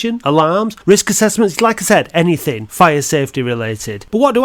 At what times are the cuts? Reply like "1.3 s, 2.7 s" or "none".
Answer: none